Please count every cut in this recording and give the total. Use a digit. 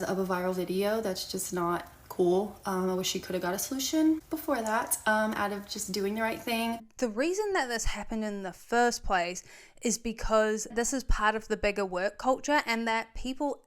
2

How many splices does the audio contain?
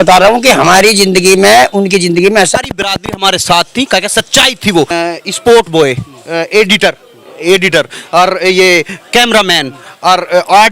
2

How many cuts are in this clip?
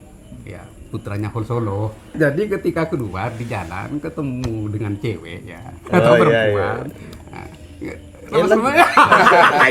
1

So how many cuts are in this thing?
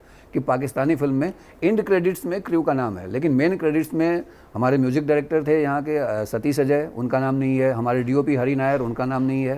0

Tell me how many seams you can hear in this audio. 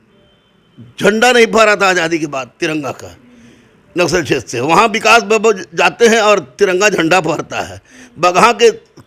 0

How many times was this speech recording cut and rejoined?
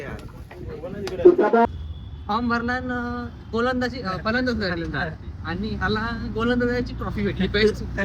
1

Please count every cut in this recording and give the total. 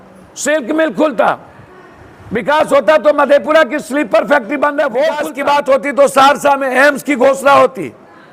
1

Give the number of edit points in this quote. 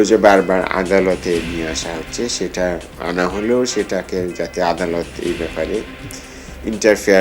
1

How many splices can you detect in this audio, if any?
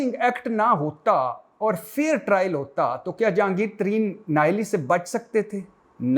0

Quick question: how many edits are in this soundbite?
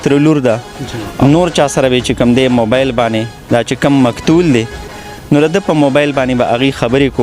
1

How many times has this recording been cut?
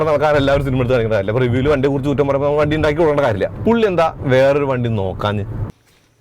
1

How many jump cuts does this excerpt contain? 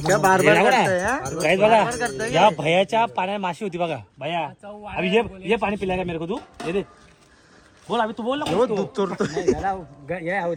0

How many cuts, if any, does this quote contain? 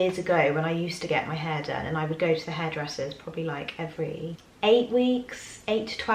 0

